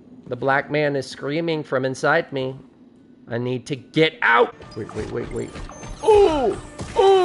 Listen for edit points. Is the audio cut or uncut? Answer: cut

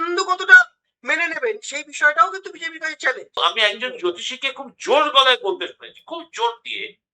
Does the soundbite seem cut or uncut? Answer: cut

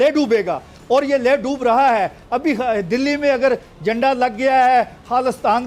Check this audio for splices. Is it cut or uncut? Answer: uncut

